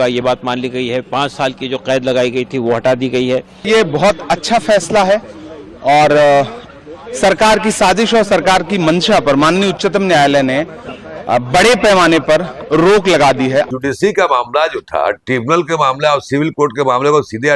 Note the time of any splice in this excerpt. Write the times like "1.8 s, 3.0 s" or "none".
3.5 s, 13.7 s